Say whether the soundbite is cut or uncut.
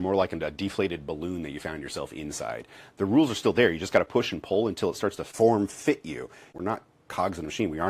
cut